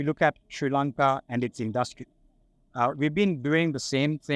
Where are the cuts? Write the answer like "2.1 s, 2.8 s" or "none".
none